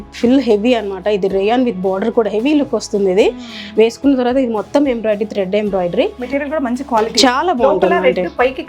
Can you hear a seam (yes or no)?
no